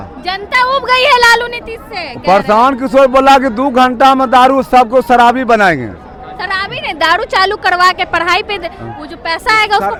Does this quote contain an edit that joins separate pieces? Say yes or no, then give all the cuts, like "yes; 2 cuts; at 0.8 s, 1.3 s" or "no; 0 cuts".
no; 0 cuts